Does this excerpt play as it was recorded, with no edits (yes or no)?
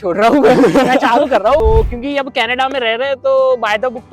no